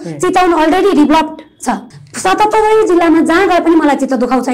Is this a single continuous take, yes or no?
no